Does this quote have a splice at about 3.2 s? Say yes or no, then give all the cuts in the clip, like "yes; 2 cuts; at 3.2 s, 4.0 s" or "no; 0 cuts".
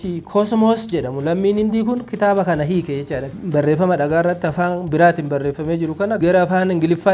yes; 1 cut; at 3.2 s